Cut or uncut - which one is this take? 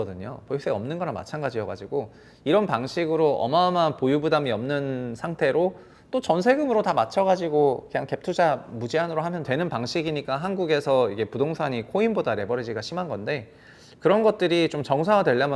cut